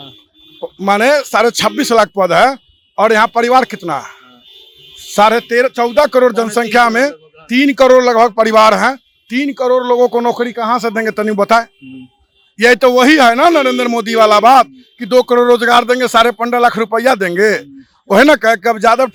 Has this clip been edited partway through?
no; 0 cuts

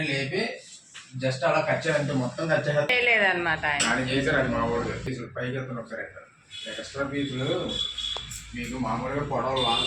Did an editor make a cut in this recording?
yes; 2 cuts; at 2.9 s, 5.1 s

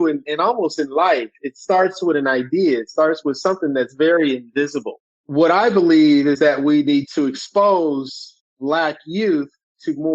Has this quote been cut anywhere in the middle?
no; 0 cuts

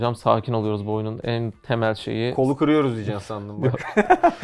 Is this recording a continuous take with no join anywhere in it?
yes; 0 cuts

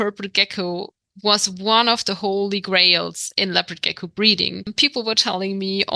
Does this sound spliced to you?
yes; 1 cut; at 4.7 s

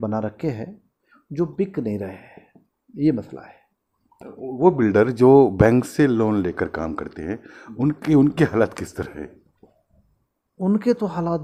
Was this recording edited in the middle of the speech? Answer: no; 0 cuts

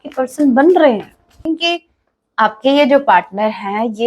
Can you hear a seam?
yes; 1 cut; at 1.4 s

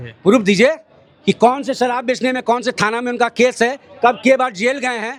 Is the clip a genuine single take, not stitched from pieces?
yes; 0 cuts

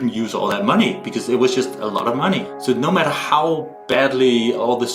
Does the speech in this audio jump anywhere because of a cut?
yes; 1 cut; at 2.5 s

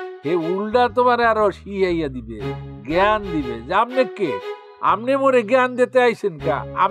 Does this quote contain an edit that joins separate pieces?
yes; 1 cut; at 4.5 s

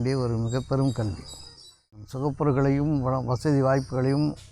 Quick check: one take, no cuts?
no; 1 cut; at 2.0 s

